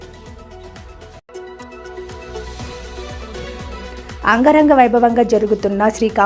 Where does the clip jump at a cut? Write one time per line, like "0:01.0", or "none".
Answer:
0:01.1
0:04.2